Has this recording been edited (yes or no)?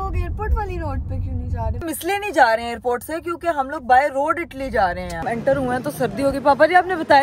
yes